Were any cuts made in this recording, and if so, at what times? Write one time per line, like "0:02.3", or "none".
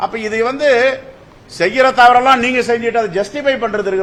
none